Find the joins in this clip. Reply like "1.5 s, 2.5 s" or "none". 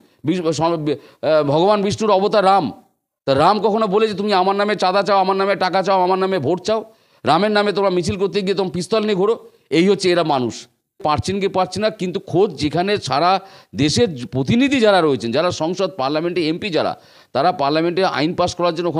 11.0 s